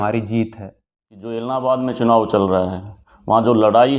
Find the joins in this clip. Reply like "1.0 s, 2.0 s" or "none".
1.4 s